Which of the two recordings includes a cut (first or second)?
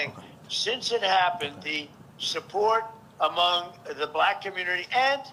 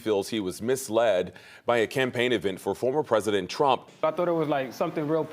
second